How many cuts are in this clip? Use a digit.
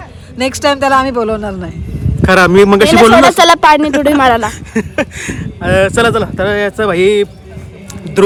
0